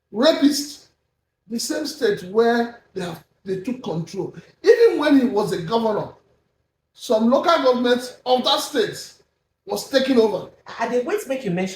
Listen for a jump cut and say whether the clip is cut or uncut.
uncut